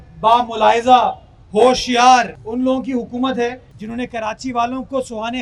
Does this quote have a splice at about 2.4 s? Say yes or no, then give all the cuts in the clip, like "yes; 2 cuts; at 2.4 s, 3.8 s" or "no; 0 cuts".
yes; 2 cuts; at 2.4 s, 3.7 s